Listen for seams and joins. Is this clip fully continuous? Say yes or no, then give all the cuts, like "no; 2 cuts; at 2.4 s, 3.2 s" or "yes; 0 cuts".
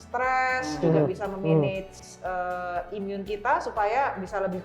no; 1 cut; at 2.0 s